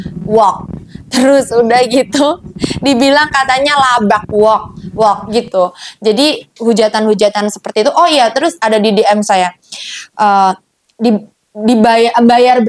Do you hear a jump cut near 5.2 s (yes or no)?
yes